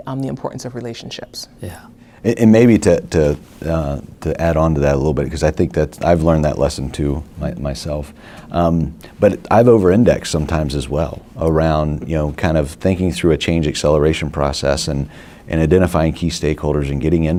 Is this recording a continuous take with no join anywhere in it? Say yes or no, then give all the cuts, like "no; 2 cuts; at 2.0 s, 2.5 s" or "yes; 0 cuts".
yes; 0 cuts